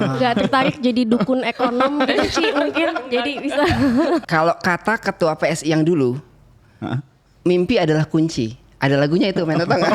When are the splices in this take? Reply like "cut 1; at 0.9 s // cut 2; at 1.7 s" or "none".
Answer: cut 1; at 4.2 s